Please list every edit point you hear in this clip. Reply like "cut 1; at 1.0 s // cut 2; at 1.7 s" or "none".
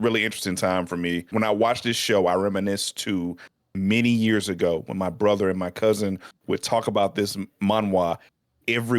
cut 1; at 1.2 s